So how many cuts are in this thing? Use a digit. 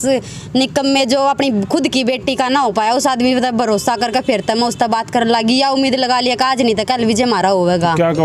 0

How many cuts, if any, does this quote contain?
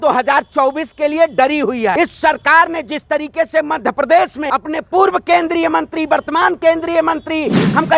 2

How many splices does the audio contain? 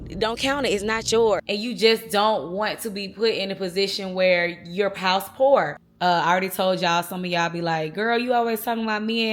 2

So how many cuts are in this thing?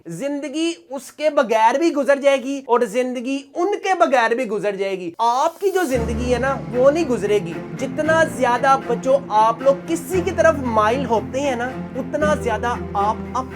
1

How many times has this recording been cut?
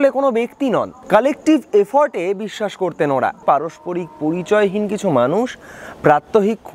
2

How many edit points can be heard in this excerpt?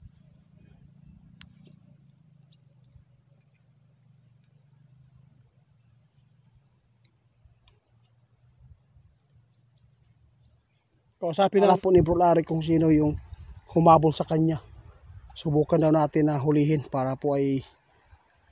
1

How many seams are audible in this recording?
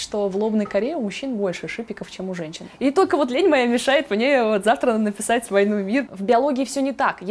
2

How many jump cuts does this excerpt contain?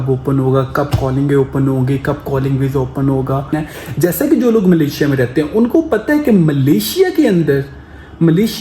1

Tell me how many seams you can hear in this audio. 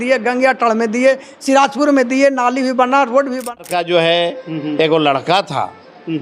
1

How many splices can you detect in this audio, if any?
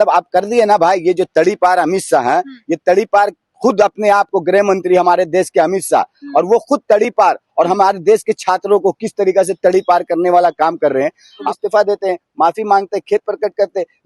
1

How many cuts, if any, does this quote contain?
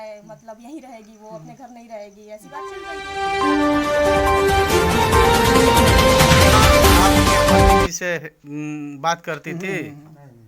2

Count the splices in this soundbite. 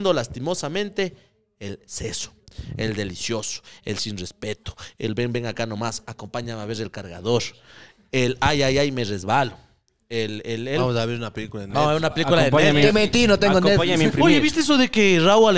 0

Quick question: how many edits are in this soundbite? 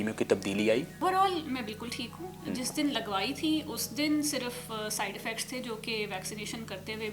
1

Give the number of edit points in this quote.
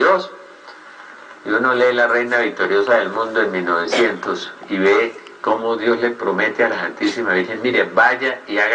0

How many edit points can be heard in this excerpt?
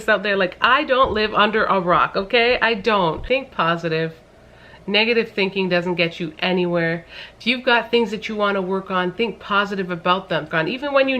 2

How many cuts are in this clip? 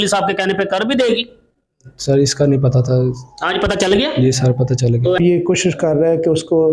1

